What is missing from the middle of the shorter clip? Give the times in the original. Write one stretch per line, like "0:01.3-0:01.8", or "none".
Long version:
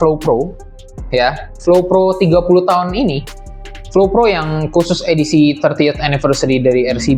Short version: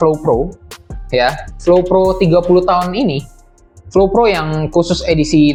none

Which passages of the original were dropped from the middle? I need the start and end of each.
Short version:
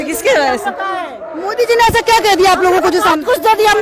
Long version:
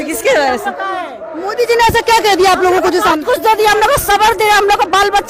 none

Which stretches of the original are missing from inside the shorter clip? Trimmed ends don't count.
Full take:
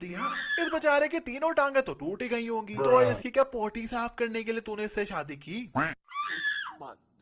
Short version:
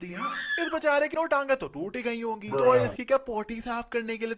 0:01.1-0:01.4

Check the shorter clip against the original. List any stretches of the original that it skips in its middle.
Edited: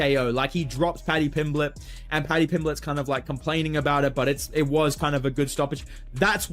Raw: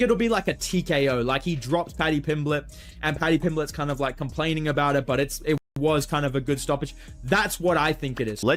0:05.6-0:05.8

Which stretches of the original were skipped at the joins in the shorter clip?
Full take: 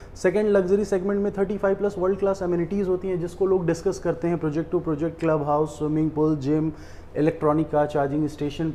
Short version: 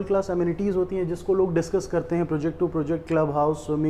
none

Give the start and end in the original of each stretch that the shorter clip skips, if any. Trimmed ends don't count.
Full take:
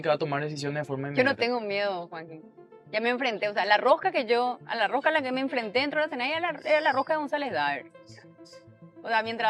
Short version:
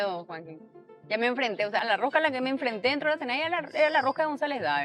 0:03.6-0:04.7

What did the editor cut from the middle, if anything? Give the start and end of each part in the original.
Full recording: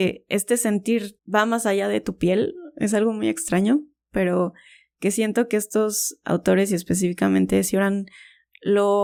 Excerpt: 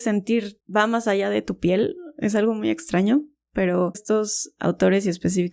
0:04.6-0:05.7

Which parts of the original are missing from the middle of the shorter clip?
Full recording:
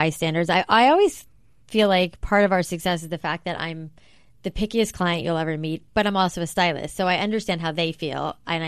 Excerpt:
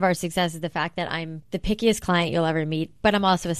0:03.8-0:04.3

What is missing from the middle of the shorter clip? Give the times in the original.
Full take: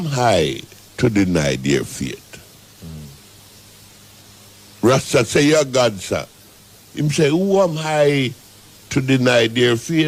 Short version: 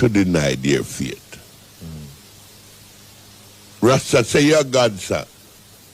none

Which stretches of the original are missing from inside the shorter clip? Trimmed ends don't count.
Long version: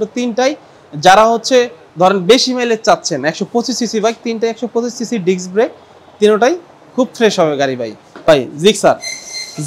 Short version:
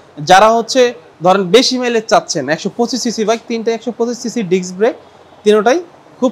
none

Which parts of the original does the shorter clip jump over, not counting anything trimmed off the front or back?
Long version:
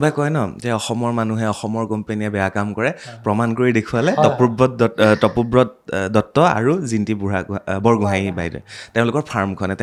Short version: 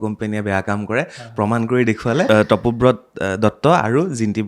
0:04.1-0:05.0

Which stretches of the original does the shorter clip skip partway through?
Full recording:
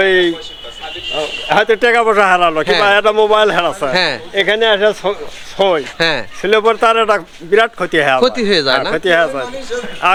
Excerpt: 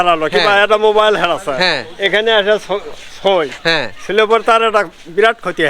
none

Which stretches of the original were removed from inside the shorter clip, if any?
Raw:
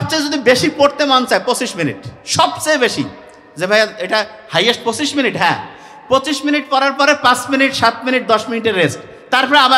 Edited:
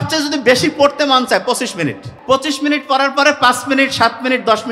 0:02.1-0:05.9

